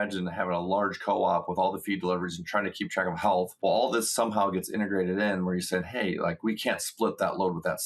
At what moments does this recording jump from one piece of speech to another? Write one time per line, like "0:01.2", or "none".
0:03.5